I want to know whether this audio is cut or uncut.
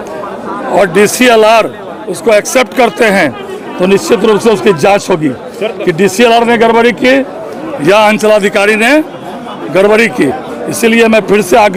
uncut